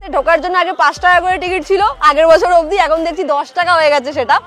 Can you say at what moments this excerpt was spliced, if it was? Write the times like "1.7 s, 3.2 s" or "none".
none